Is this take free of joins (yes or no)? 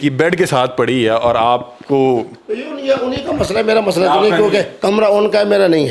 yes